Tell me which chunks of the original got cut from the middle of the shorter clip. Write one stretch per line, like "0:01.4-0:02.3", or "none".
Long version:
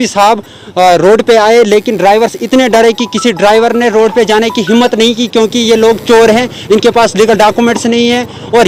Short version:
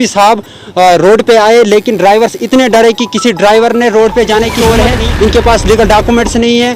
0:04.5-0:06.0